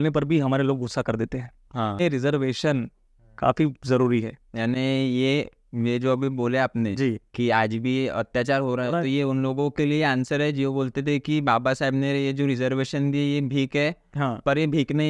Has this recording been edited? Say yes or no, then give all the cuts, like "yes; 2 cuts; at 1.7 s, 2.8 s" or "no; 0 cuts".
yes; 1 cut; at 2.0 s